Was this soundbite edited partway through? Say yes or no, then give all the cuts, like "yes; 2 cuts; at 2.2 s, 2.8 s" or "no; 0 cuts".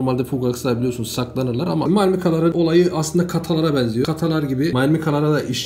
yes; 2 cuts; at 1.9 s, 4.3 s